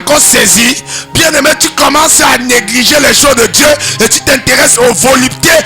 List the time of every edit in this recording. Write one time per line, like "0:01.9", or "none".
none

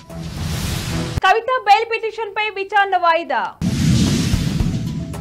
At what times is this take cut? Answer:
0:01.2

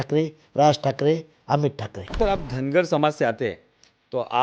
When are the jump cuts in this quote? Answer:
0:02.1

